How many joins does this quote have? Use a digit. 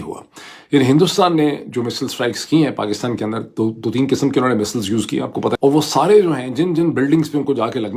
1